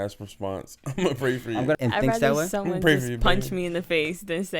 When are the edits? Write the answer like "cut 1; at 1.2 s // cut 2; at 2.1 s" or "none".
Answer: cut 1; at 1.7 s